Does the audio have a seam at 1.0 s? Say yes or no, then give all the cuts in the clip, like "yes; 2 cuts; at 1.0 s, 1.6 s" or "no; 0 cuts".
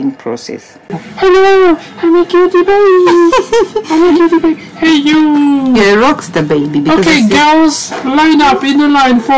yes; 1 cut; at 1.0 s